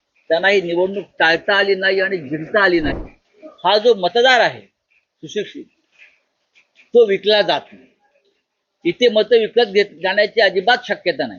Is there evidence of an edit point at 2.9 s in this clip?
yes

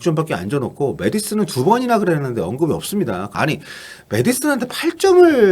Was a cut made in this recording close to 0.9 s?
no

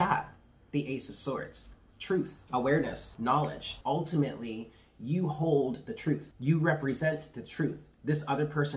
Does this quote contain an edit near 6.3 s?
yes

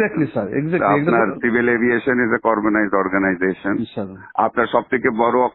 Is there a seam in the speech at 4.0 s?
no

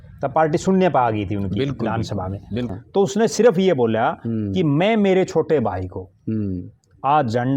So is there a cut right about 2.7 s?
yes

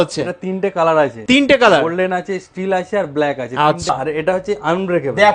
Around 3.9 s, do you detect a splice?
yes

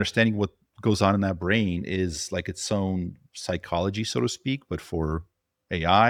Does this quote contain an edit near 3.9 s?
no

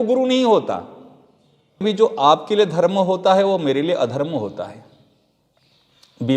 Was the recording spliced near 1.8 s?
yes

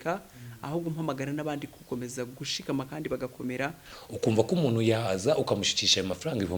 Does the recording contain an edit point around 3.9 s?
yes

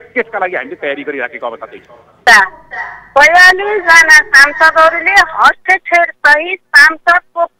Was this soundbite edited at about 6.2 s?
no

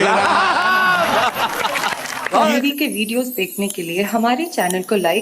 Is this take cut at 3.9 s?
no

